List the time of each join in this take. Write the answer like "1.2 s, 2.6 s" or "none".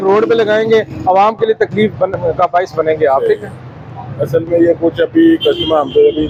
none